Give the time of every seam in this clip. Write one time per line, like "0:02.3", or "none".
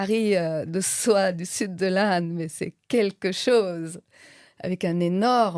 none